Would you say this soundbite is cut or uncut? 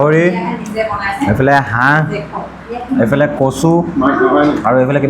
uncut